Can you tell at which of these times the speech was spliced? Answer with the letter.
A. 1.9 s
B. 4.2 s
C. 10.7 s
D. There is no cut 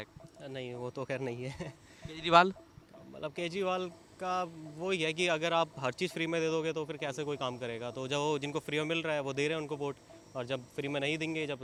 D